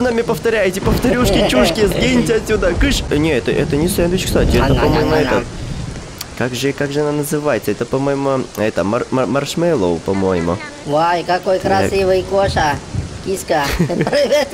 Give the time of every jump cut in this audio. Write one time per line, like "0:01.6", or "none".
0:03.1